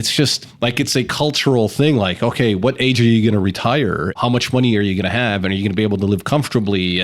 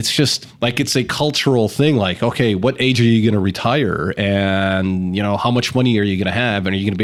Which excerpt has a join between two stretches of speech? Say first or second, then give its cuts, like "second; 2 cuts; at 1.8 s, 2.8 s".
first; 1 cut; at 4.2 s